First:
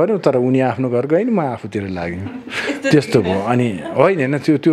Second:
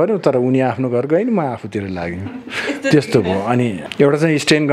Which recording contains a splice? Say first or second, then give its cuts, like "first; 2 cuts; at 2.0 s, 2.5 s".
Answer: second; 1 cut; at 3.8 s